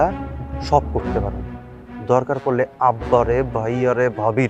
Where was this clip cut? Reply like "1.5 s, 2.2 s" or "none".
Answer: none